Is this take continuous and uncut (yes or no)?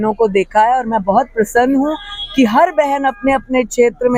yes